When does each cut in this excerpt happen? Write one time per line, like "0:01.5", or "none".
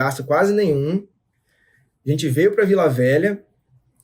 none